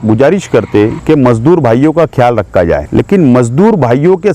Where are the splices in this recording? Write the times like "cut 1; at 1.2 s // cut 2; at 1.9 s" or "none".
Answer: cut 1; at 1.0 s // cut 2; at 2.9 s